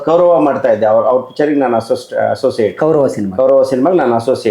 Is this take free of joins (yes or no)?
yes